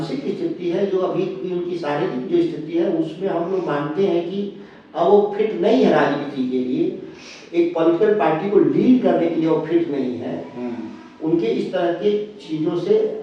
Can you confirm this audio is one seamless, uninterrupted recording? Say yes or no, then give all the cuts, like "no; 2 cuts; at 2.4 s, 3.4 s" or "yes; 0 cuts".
yes; 0 cuts